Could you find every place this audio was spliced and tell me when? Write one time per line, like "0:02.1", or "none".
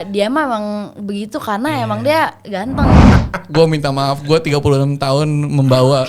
0:03.1